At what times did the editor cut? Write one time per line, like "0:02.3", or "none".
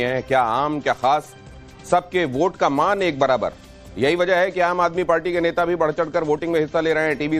0:04.8